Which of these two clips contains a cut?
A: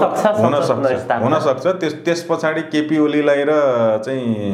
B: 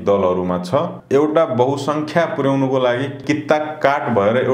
B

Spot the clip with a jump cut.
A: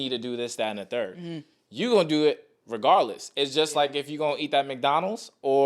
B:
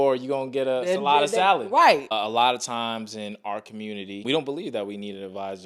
B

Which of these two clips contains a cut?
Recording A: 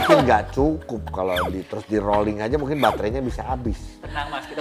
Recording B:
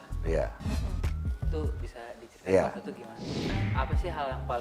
B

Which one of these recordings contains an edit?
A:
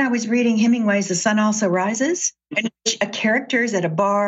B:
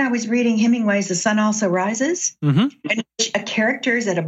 A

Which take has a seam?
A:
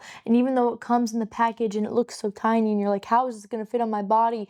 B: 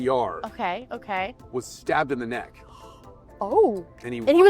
B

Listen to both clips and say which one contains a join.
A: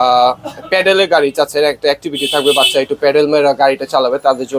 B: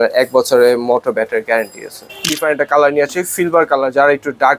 B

